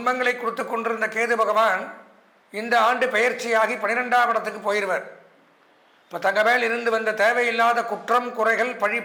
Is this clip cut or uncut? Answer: uncut